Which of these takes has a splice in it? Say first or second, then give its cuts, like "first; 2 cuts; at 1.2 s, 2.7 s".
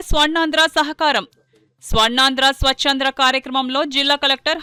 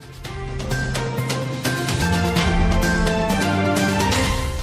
second; 1 cut; at 1.0 s